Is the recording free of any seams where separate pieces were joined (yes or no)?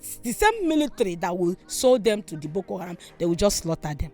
yes